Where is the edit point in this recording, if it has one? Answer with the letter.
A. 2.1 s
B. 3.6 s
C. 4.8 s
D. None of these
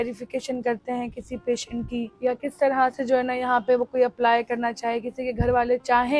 A